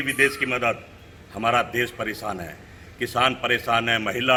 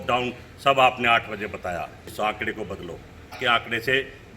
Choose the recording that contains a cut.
second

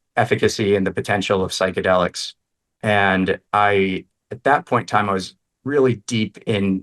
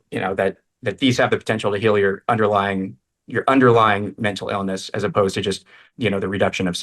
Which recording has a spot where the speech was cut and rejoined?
second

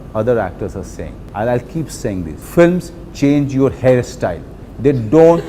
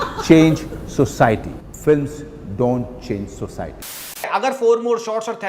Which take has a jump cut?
second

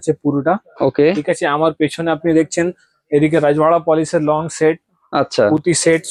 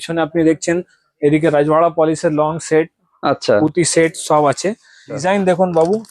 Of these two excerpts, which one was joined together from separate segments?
second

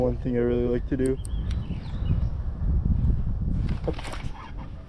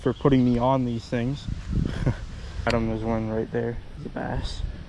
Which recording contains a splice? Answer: second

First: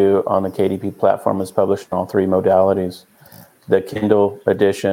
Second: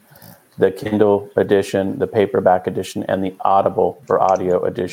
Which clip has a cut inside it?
second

